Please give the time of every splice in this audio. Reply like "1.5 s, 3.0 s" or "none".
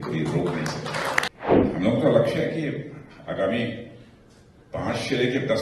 1.3 s